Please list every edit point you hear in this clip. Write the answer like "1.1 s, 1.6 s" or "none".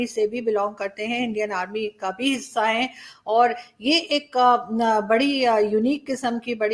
none